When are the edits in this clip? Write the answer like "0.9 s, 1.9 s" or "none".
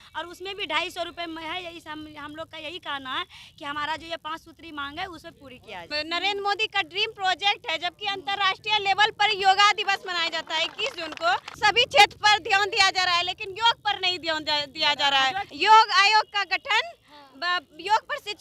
5.9 s, 11.6 s, 15.5 s